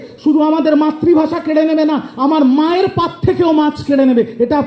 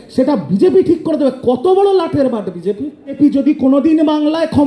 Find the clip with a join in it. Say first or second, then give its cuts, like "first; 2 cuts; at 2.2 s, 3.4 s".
second; 1 cut; at 3.2 s